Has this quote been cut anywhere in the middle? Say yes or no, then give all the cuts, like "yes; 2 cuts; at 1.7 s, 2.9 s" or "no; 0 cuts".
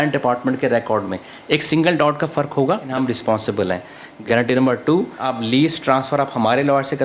yes; 3 cuts; at 2.9 s, 4.1 s, 5.3 s